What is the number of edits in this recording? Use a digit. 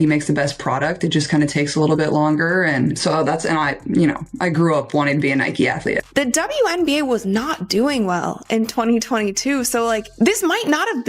1